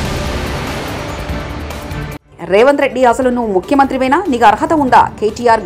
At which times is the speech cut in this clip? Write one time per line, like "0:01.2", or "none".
0:02.2